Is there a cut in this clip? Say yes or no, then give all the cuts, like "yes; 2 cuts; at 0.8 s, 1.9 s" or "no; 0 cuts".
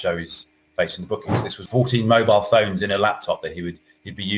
yes; 1 cut; at 1.6 s